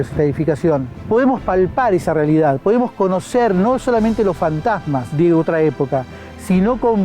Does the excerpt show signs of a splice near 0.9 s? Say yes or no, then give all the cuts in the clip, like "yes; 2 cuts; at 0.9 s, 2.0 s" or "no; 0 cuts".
yes; 2 cuts; at 0.9 s, 5.1 s